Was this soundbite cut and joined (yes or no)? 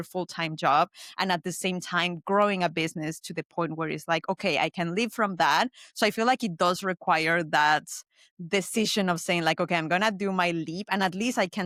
no